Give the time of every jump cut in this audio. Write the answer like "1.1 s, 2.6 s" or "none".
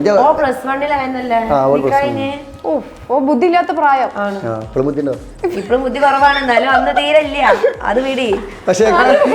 2.5 s